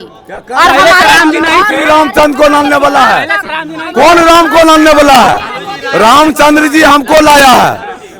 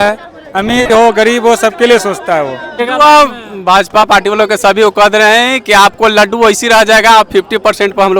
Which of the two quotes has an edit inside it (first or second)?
second